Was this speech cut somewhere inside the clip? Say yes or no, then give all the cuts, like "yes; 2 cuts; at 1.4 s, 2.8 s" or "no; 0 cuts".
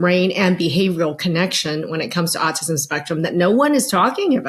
no; 0 cuts